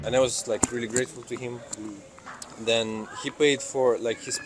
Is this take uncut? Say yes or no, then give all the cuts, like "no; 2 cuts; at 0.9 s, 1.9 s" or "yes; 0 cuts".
yes; 0 cuts